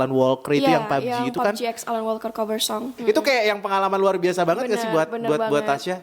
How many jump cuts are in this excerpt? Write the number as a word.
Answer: one